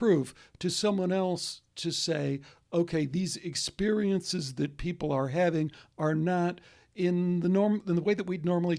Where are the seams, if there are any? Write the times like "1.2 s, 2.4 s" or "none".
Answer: none